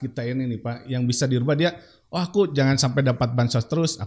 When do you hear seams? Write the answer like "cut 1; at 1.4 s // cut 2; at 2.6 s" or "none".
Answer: none